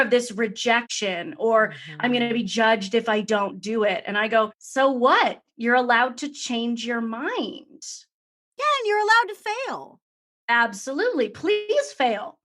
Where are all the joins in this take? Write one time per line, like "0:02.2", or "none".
0:01.0
0:04.6